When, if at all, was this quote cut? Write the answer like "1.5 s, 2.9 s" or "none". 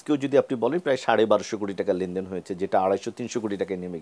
none